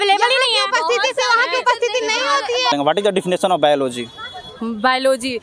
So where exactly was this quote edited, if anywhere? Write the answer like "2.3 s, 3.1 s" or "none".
2.7 s